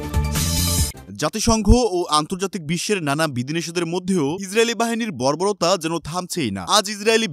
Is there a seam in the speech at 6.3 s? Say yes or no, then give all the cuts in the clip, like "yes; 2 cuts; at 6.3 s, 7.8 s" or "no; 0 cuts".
no; 1 cut; at 1.0 s